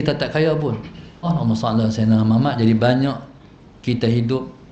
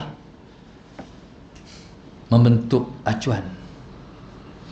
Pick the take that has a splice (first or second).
first